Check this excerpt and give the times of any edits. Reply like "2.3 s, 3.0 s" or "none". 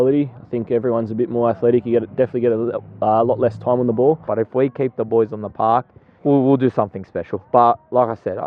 4.2 s, 6.0 s

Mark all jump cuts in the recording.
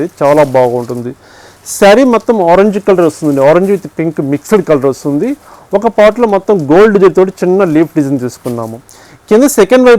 none

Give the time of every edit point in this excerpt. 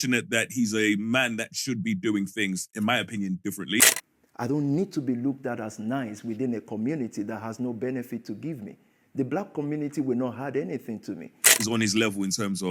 3.8 s, 11.4 s

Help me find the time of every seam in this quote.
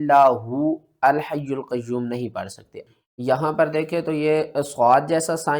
2.8 s

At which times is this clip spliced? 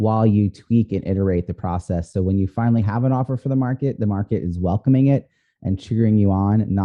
none

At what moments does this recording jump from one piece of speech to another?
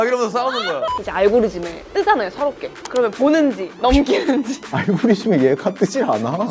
1.0 s, 1.8 s, 2.7 s, 3.7 s, 4.6 s

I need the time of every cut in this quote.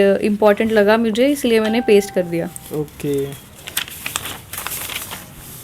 none

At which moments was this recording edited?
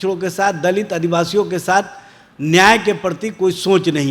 none

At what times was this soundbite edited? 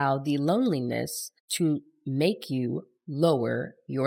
none

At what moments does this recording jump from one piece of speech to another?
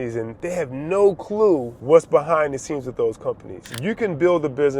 3.7 s

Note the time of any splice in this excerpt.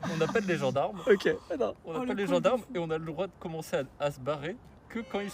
none

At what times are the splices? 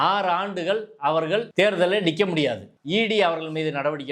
1.5 s, 2.7 s

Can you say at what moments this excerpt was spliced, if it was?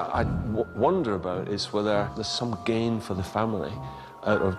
2.2 s

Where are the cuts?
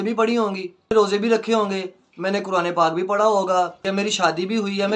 0.9 s, 3.8 s

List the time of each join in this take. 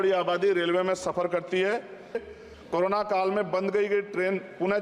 2.3 s

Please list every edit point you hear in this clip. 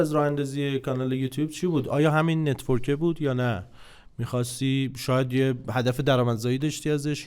none

